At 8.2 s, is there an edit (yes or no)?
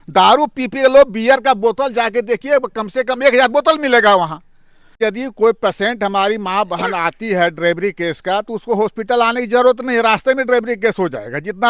no